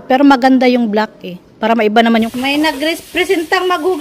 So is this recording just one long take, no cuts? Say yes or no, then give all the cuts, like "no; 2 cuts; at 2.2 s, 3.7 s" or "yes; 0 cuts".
no; 1 cut; at 2.3 s